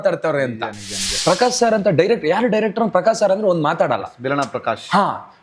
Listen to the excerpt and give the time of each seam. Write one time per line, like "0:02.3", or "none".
0:01.1